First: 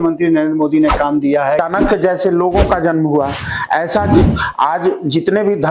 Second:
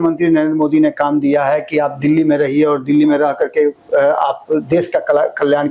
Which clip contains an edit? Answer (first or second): first